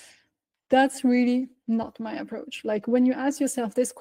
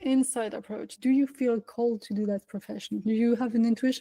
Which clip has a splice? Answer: second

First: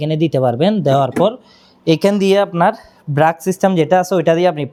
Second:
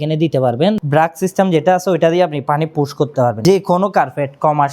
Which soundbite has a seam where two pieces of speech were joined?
second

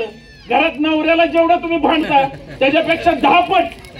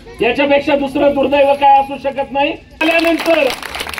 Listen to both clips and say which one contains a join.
second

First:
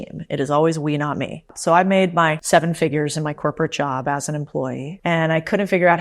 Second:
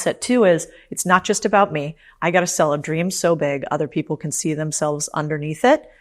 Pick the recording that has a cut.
first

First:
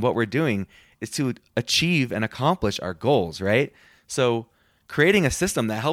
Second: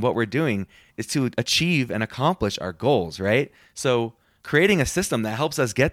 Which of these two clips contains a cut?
second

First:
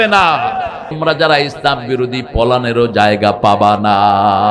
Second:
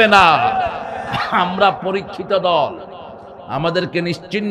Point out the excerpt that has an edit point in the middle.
first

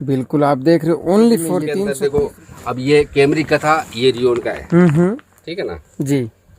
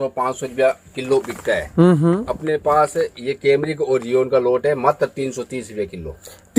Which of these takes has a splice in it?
first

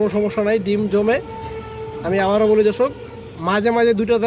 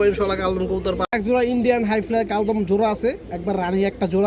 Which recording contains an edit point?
second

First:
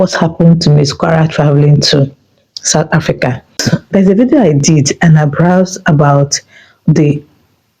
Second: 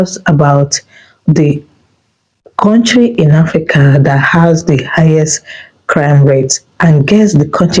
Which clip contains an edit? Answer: first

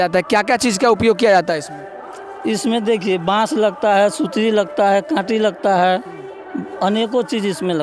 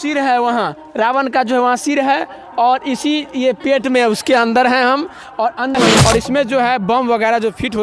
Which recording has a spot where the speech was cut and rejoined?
second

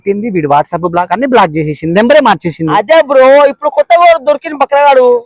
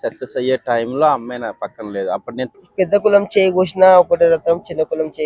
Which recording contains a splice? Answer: second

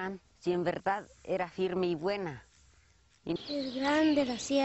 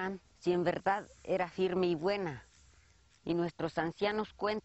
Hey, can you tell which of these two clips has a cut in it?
second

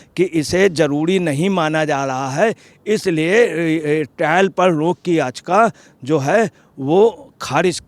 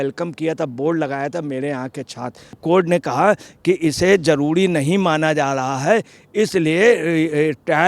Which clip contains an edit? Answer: second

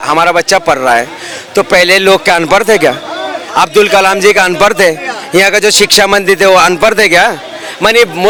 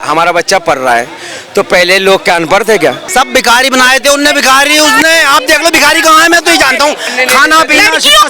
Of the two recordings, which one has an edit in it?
second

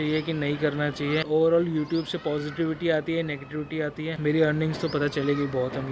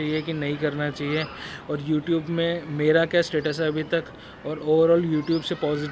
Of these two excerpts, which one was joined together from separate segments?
first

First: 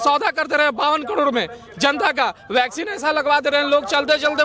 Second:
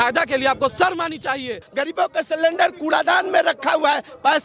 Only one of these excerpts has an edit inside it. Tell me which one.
second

